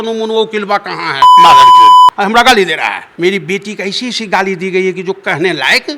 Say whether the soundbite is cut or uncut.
cut